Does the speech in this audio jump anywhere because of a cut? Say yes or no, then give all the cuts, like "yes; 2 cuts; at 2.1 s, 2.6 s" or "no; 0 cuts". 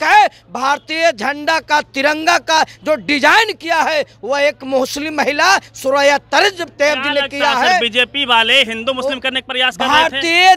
no; 0 cuts